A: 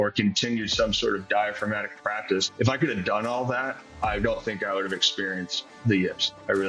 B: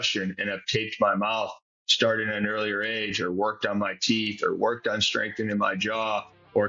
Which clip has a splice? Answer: A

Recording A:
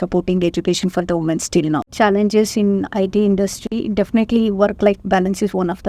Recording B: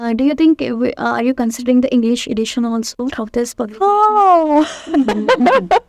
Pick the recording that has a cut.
A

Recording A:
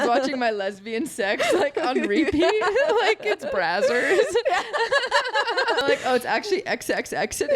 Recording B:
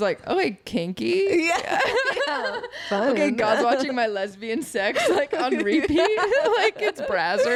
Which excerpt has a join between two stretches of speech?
A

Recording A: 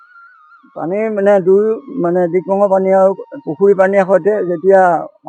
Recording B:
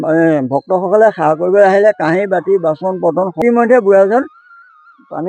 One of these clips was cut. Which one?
B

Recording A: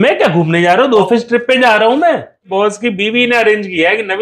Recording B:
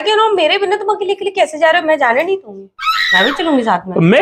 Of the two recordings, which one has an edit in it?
A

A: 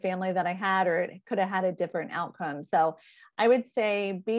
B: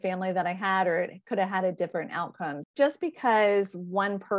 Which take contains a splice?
B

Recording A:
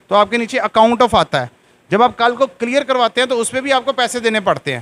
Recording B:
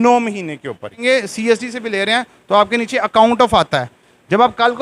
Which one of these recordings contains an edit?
B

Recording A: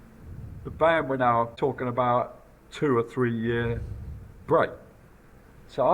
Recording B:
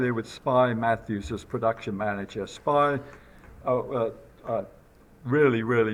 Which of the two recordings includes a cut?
A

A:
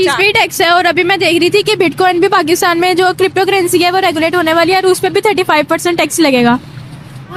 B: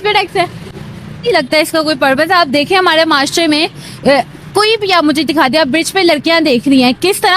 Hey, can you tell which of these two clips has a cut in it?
B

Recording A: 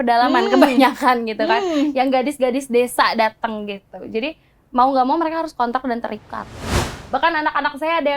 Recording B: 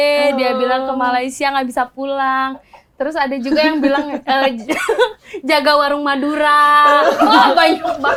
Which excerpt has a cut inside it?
A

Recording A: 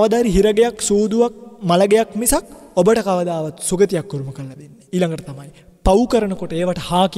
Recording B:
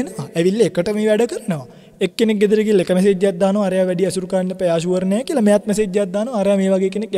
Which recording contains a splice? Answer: A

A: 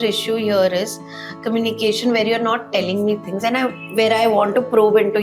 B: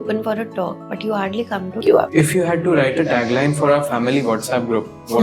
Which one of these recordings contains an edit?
B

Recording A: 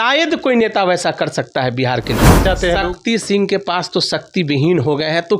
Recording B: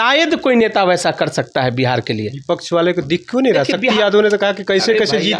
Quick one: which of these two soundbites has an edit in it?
A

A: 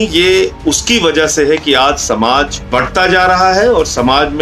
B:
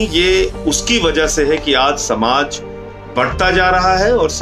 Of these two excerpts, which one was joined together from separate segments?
A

